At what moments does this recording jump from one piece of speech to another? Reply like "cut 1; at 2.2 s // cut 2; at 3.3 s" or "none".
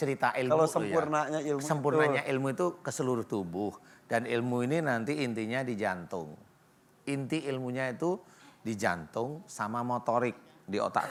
none